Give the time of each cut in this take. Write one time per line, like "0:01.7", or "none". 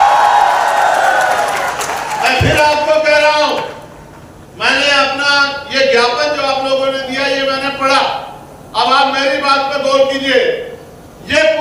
none